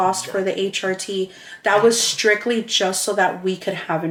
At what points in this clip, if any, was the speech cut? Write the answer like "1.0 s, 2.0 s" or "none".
none